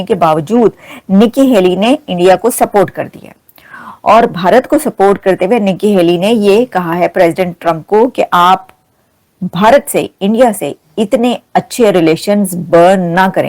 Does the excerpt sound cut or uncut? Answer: uncut